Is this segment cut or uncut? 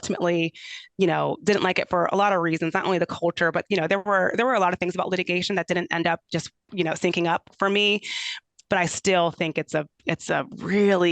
cut